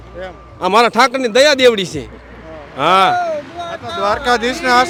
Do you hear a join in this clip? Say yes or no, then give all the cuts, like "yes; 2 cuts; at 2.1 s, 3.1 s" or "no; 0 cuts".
no; 0 cuts